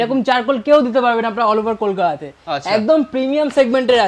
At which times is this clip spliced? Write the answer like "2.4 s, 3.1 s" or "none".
none